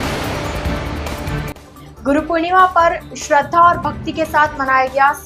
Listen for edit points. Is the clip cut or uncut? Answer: cut